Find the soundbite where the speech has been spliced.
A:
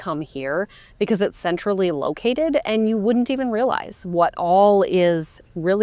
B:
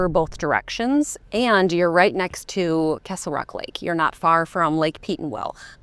B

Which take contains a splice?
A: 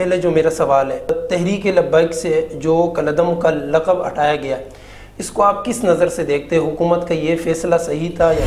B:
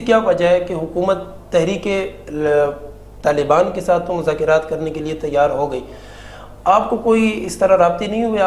A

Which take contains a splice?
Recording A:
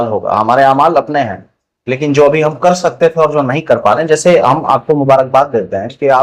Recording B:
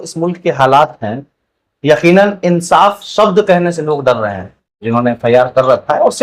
B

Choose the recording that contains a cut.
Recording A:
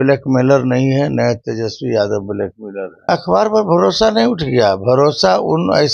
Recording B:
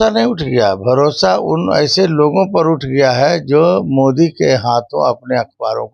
A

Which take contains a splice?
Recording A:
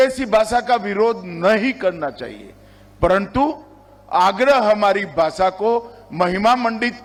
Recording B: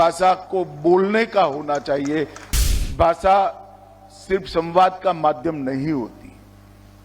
B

